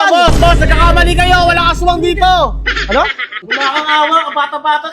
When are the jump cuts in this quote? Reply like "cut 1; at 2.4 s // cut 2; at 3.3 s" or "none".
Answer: cut 1; at 3.4 s